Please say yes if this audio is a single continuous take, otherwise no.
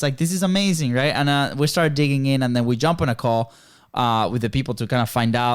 yes